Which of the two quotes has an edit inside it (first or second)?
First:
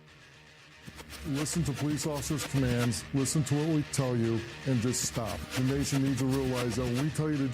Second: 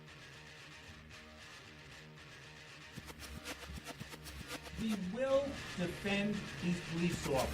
second